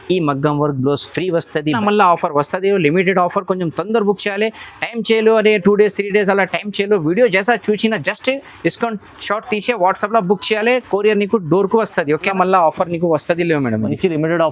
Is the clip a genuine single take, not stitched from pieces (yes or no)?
no